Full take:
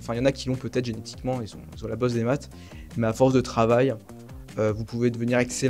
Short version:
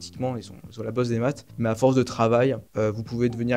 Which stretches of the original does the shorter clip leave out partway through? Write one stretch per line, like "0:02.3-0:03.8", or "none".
0:02.5-0:02.8
0:04.0-0:04.5